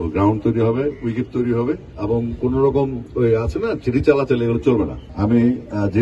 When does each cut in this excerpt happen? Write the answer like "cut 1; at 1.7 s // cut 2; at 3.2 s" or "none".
cut 1; at 1.9 s // cut 2; at 5.0 s